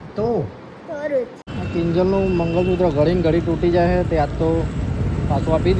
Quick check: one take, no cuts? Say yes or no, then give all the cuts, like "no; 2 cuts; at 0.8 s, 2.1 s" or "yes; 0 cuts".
no; 1 cut; at 1.5 s